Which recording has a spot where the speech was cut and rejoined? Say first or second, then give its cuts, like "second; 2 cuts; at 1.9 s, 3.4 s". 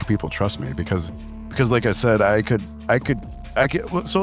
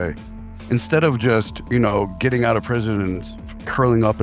second; 1 cut; at 1.6 s